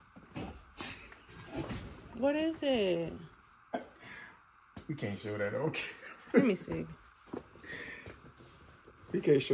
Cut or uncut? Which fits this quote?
uncut